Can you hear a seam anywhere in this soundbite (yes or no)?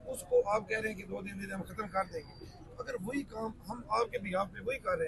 no